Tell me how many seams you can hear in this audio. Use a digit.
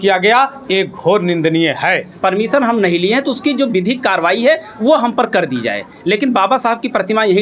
1